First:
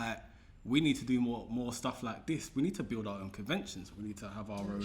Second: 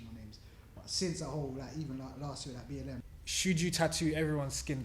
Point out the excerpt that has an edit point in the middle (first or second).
second